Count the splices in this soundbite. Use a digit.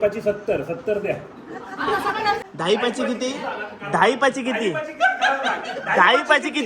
1